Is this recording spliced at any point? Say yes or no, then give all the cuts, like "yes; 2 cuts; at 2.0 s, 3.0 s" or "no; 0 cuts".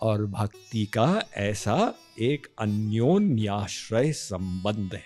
no; 0 cuts